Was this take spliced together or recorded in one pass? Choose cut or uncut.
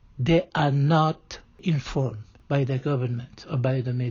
cut